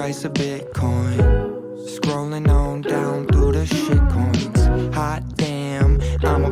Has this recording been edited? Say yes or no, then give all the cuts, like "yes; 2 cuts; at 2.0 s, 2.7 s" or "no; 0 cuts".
no; 0 cuts